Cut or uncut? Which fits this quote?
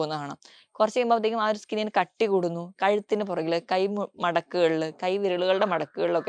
uncut